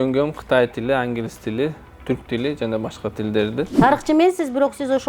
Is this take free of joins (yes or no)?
no